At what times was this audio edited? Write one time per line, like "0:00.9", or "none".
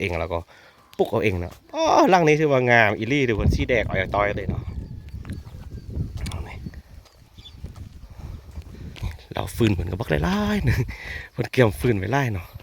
0:09.0